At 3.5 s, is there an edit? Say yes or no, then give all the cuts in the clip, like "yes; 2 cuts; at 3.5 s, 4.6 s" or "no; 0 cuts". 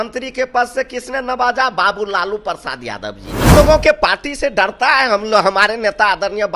yes; 1 cut; at 3.5 s